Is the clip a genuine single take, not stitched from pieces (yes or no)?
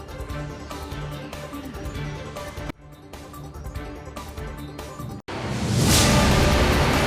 yes